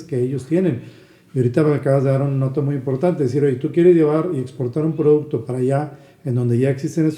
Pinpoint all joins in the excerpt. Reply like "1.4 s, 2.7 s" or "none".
none